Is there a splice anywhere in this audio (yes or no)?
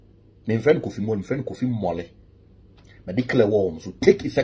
no